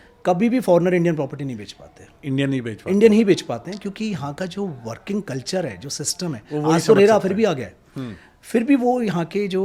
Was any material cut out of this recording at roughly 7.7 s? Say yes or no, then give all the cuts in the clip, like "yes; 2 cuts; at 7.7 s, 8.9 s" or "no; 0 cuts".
no; 0 cuts